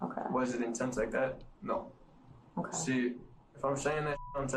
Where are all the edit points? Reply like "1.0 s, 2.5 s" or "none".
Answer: none